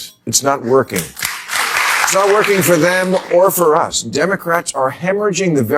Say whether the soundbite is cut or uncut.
cut